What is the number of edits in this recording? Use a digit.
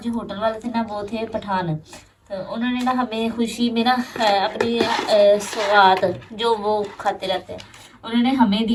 0